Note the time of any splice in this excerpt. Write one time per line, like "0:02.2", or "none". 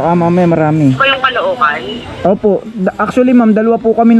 0:01.1